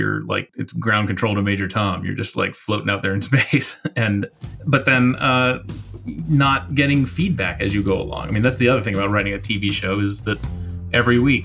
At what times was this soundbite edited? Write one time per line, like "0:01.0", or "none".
none